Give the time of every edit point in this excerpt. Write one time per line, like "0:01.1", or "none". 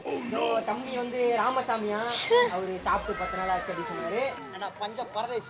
0:04.5